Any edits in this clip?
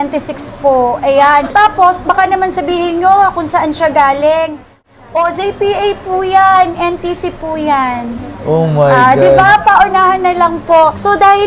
no; 0 cuts

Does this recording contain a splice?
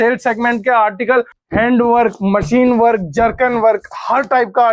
yes; 1 cut; at 1.4 s

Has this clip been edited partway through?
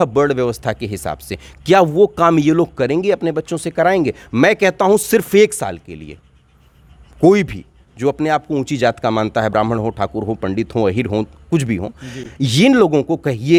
no; 0 cuts

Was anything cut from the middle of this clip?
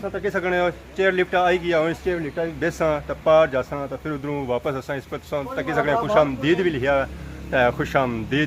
no; 0 cuts

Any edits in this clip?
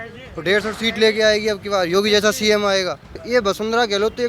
yes; 1 cut; at 3.1 s

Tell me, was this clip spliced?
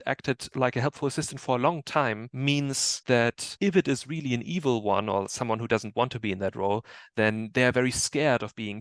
no; 0 cuts

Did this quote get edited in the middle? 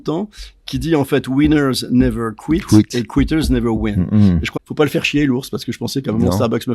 yes; 1 cut; at 4.5 s

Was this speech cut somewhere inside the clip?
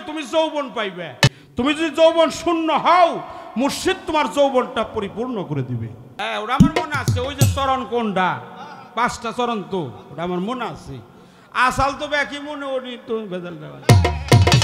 yes; 2 cuts; at 1.4 s, 6.0 s

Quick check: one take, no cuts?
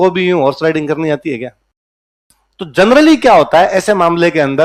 yes; 0 cuts

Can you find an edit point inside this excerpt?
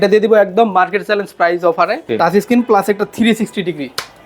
yes; 1 cut; at 2.1 s

